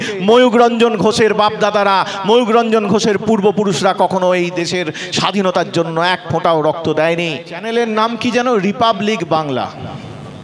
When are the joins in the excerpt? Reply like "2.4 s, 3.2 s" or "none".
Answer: 7.7 s